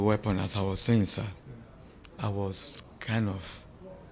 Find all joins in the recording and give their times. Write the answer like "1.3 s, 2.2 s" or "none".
none